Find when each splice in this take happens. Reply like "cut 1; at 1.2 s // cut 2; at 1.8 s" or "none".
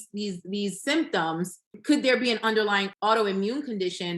cut 1; at 1.8 s // cut 2; at 2.9 s